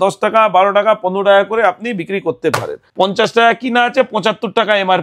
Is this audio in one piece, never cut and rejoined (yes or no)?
no